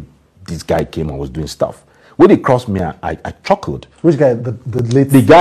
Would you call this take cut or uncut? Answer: uncut